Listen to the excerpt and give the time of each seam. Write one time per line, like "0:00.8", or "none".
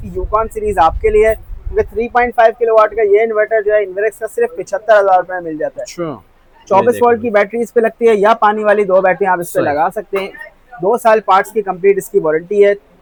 none